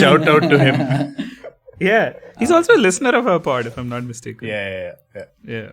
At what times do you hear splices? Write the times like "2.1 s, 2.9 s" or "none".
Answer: none